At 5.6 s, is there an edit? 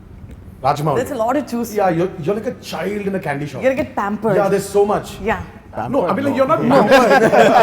no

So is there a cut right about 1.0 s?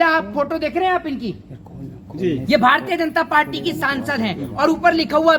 no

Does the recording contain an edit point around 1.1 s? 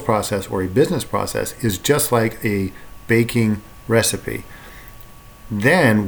no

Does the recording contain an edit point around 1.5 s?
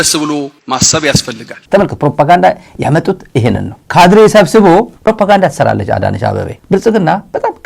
yes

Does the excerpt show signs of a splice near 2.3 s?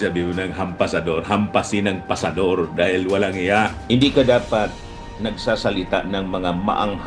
no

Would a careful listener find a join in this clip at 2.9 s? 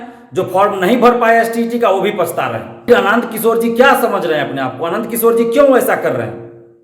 yes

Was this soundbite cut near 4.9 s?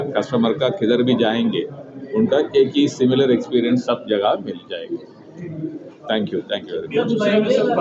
no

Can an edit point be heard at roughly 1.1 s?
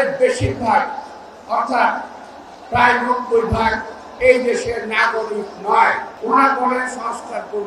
no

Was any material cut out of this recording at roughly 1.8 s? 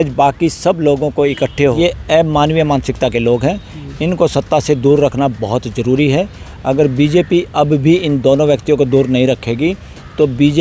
yes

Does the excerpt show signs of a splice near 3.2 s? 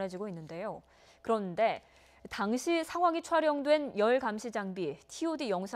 yes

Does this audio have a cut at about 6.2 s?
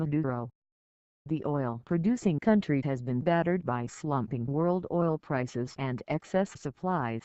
no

